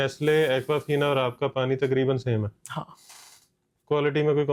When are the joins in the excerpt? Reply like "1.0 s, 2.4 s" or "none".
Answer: none